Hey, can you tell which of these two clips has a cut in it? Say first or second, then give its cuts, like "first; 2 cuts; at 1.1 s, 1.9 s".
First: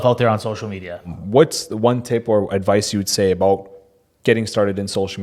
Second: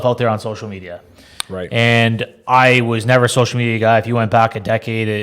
first; 1 cut; at 1.2 s